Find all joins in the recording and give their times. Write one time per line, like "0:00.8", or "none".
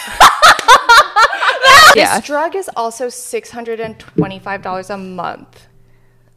0:01.9